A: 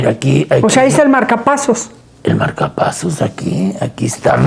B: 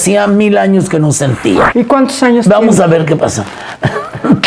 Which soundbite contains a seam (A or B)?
B